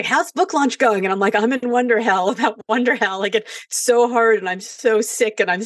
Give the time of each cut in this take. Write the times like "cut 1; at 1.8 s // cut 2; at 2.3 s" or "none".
none